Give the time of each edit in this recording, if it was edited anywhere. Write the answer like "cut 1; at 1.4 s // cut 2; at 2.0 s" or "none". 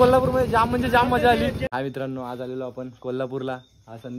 cut 1; at 1.7 s